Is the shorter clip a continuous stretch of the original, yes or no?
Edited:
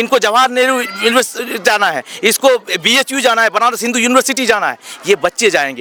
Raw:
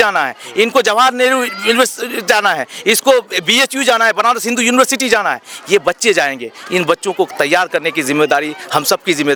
yes